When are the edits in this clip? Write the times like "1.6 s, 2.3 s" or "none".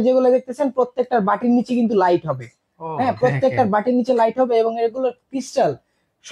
none